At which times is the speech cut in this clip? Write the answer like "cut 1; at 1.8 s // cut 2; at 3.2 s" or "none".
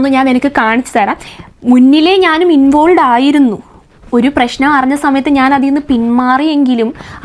cut 1; at 1.3 s